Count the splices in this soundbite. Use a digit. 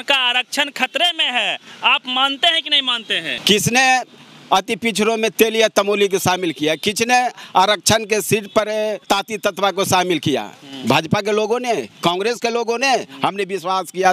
2